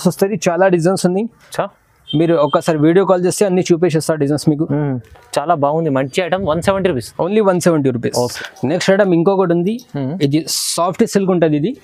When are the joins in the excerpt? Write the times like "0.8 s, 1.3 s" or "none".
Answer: none